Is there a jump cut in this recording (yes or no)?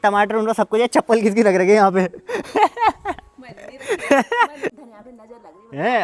yes